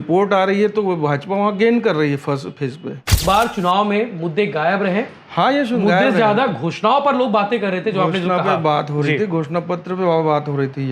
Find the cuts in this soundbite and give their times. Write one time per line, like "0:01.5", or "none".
0:03.1